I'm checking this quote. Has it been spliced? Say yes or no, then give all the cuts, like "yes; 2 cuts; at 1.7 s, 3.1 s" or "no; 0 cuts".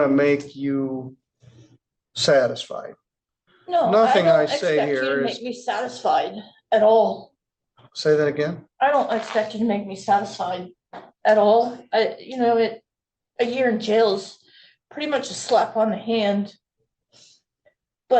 no; 0 cuts